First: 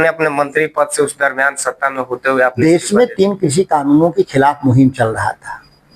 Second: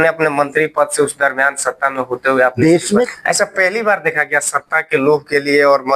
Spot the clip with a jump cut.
second; 1 cut; at 3.1 s

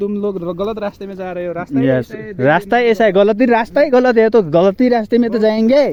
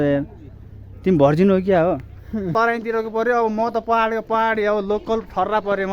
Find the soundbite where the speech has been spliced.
second; 1 cut; at 2.5 s

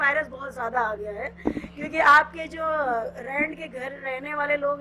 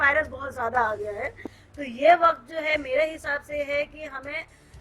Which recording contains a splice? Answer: second; 1 cut; at 1.4 s

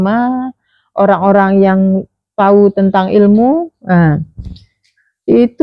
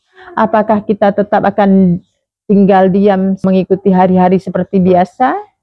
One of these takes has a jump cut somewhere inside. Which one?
second; 1 cut; at 3.4 s

